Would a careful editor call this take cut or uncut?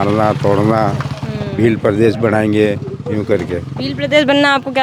uncut